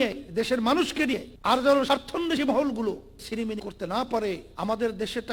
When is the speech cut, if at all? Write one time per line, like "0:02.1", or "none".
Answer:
0:01.3
0:03.2
0:04.5